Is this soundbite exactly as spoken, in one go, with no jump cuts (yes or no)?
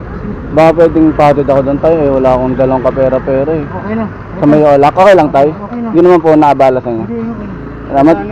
no